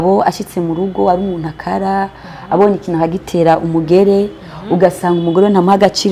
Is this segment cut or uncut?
uncut